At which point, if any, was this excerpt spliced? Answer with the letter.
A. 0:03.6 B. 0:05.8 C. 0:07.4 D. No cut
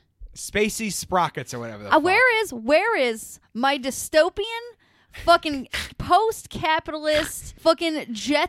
C